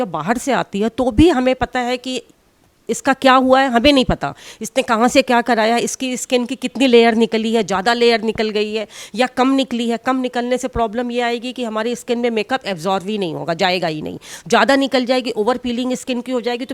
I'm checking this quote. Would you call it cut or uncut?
uncut